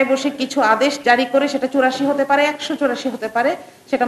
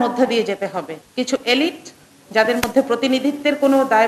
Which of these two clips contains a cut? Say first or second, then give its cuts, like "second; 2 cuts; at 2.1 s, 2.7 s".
second; 1 cut; at 1.0 s